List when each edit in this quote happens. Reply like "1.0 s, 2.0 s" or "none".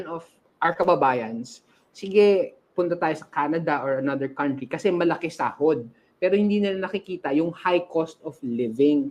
none